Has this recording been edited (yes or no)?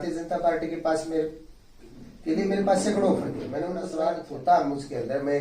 yes